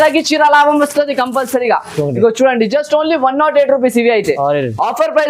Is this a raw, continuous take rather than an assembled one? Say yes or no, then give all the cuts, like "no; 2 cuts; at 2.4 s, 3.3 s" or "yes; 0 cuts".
yes; 0 cuts